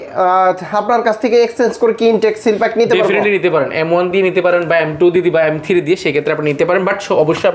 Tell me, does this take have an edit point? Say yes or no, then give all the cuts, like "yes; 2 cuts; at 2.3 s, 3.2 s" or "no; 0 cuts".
no; 0 cuts